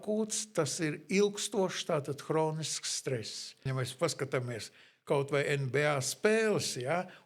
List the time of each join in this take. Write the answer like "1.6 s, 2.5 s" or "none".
3.5 s

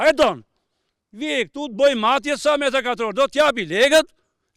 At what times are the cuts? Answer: none

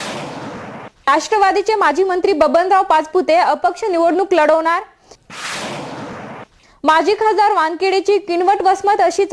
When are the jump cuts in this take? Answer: 0.9 s

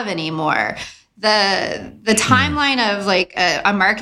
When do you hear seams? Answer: none

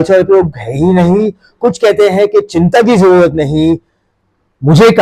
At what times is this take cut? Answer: none

